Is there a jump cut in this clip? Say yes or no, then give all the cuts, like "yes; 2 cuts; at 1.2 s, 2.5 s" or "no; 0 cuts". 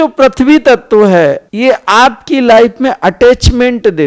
no; 0 cuts